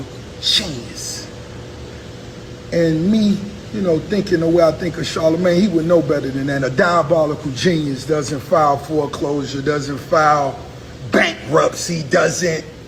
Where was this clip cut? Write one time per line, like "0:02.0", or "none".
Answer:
none